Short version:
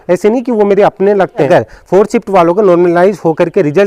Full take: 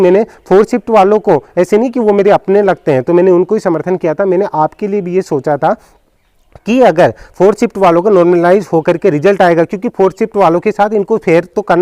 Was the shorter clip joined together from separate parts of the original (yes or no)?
yes